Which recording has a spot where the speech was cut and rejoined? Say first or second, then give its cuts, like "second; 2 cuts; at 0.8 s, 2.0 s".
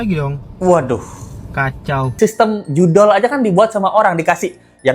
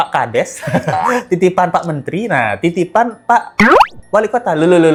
first; 1 cut; at 2.1 s